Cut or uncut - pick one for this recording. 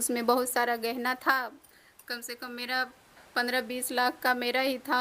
uncut